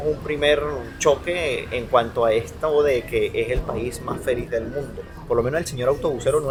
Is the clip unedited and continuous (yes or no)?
yes